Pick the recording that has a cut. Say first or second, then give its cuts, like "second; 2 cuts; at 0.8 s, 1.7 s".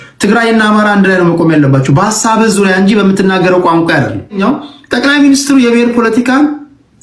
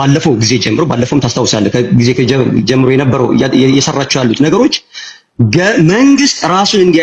first; 1 cut; at 4.4 s